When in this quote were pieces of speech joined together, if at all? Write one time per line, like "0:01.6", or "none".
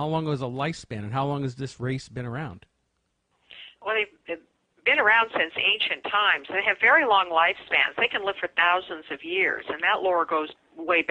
none